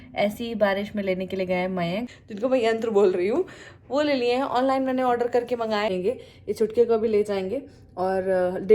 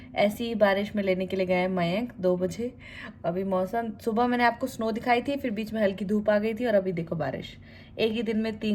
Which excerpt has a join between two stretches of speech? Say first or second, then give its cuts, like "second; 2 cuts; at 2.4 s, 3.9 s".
first; 2 cuts; at 2.1 s, 5.9 s